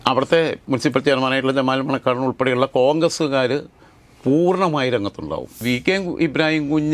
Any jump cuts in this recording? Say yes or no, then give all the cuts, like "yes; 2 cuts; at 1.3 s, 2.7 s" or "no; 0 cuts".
yes; 1 cut; at 5.6 s